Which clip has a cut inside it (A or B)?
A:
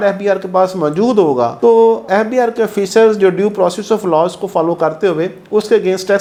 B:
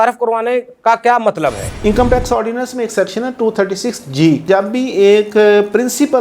B